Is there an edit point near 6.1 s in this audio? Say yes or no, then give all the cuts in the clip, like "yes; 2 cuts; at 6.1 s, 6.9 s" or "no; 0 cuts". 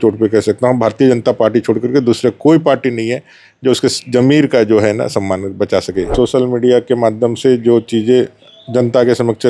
yes; 1 cut; at 6.1 s